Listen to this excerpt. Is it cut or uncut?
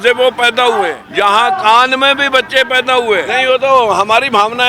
cut